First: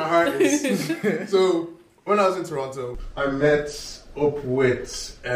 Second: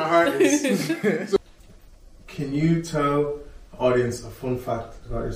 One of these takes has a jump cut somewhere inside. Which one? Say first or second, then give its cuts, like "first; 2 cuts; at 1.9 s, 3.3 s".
second; 1 cut; at 1.4 s